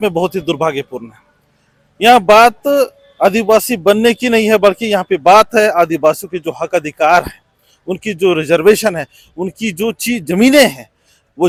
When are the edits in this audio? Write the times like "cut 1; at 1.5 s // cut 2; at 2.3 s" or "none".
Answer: none